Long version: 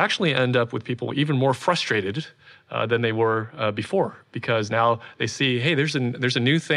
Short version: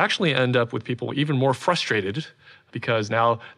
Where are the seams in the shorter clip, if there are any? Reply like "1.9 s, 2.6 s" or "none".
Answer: 2.6 s